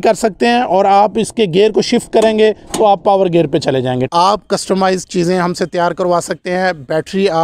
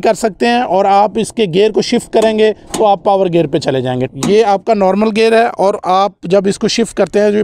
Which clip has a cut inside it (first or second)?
first